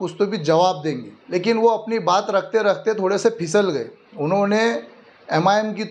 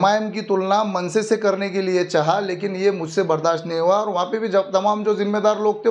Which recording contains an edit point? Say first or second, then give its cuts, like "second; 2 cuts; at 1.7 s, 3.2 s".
first; 1 cut; at 1.1 s